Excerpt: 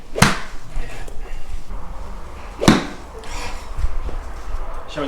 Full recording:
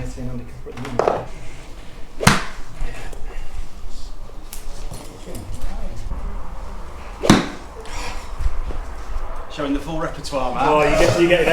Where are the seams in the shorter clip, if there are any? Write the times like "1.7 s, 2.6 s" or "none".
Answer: 1.7 s